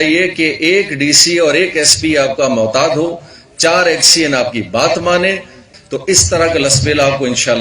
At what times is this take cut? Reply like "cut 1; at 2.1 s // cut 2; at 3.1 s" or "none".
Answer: cut 1; at 5.7 s